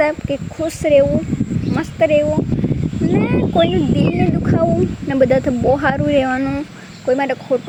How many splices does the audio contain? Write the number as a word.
zero